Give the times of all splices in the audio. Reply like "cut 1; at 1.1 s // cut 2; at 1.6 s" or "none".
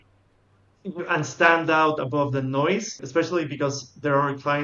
cut 1; at 3.0 s

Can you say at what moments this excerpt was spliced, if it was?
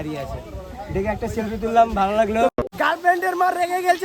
cut 1; at 2.6 s

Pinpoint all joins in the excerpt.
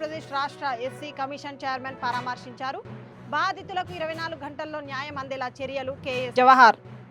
none

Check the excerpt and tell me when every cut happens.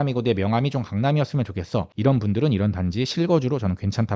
cut 1; at 1.9 s

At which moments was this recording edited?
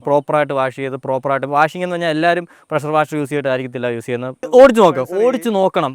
cut 1; at 4.5 s

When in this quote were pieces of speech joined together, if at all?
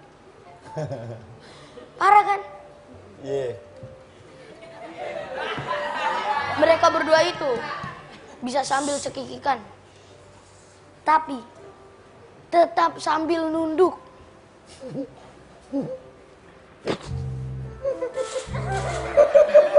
none

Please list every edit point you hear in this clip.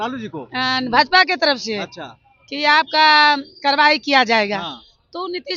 none

